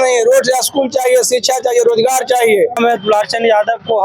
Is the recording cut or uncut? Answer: cut